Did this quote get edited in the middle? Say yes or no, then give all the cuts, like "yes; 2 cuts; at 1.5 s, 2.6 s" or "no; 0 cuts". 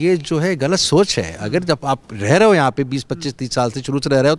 no; 0 cuts